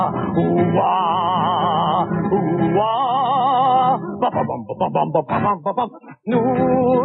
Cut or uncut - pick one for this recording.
cut